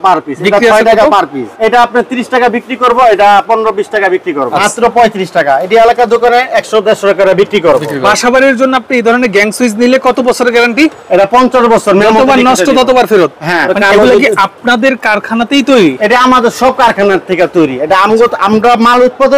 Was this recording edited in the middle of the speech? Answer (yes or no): yes